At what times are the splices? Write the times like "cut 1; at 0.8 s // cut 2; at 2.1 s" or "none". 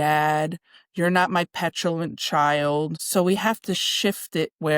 cut 1; at 3.0 s